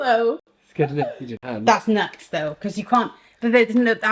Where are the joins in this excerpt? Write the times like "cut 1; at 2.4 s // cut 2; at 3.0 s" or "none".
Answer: cut 1; at 1.3 s